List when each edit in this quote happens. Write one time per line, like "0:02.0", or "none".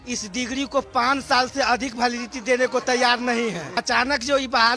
0:03.8